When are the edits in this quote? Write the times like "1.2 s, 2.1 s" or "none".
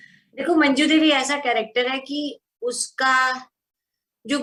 none